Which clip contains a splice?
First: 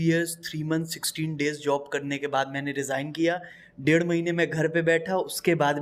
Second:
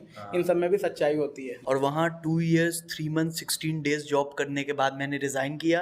second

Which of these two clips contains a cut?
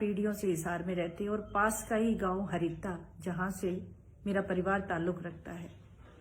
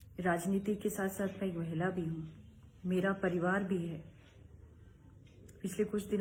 first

